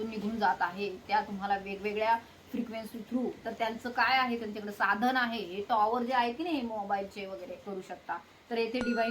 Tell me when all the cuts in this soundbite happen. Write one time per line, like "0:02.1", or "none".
0:07.7